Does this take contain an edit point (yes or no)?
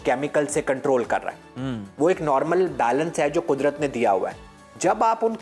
no